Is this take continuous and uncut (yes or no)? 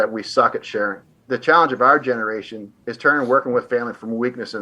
no